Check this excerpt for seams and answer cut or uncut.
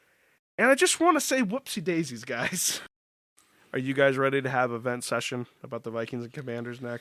cut